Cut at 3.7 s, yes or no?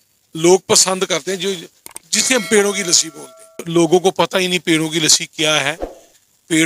yes